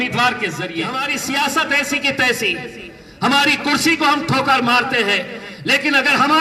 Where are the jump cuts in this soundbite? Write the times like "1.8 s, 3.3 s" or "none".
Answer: 1.0 s

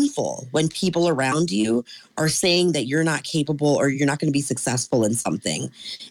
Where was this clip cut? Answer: 3.9 s

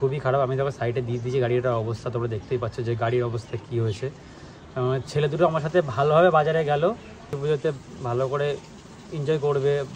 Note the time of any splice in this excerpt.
none

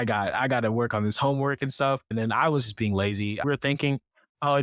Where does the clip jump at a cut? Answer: 2.1 s, 3.4 s

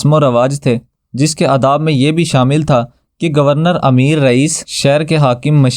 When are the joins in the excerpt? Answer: 1.0 s, 4.7 s

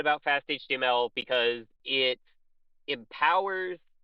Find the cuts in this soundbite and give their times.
none

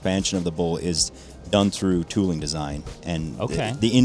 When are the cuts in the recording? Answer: none

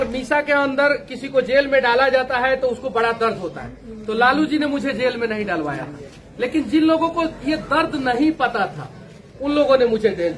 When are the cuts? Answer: none

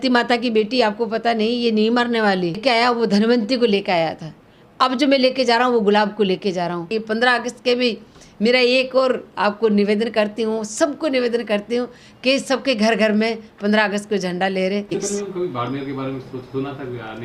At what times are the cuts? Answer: 2.6 s, 6.9 s, 14.9 s

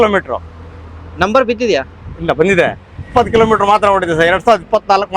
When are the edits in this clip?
none

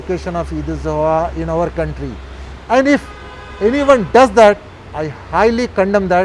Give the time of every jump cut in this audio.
none

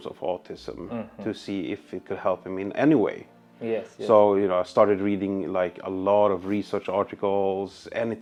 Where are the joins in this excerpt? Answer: none

